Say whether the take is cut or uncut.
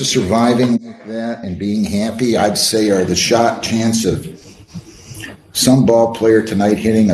uncut